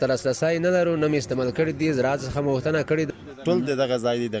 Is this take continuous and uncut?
no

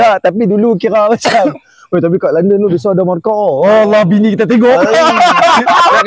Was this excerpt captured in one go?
yes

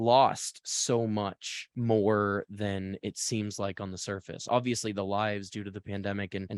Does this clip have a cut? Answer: no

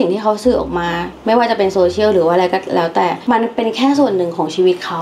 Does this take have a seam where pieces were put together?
yes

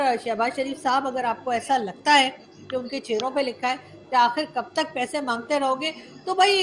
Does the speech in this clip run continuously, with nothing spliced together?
yes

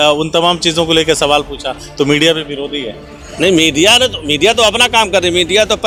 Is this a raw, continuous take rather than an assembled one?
yes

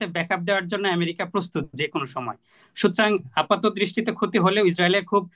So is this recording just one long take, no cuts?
yes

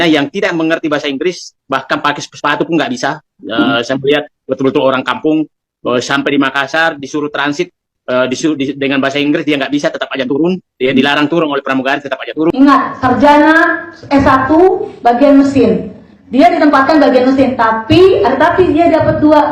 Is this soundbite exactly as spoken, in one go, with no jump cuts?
no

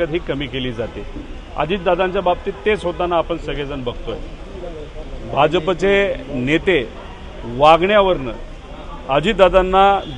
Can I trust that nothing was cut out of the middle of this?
yes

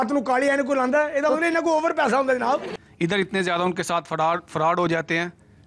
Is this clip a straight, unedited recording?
no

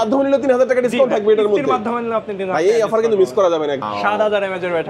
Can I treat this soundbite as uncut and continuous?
no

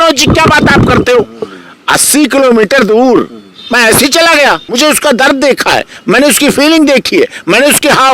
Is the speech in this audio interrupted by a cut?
yes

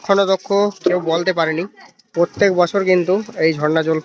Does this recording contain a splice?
yes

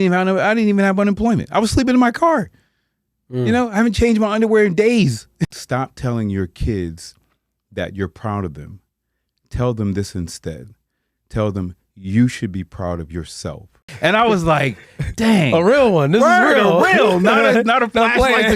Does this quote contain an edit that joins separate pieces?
yes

